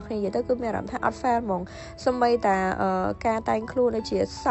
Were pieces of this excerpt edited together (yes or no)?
no